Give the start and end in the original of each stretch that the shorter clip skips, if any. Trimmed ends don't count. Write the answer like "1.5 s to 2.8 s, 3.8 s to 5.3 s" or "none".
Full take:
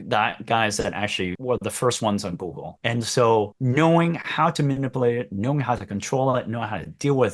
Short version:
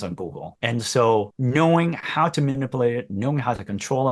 none